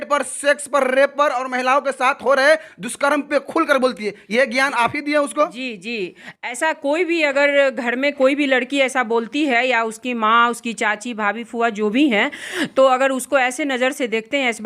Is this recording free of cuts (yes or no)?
yes